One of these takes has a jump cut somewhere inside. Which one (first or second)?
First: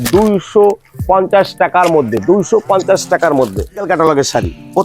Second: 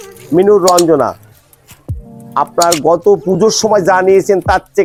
first